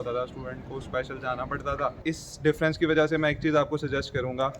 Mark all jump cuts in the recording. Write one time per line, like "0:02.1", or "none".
0:02.0